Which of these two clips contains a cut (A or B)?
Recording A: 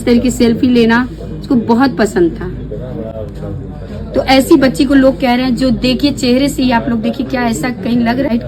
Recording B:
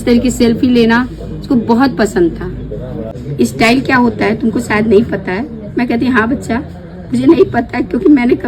B